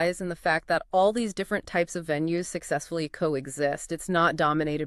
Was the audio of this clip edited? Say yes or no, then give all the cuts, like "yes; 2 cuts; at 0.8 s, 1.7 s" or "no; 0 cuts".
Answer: no; 0 cuts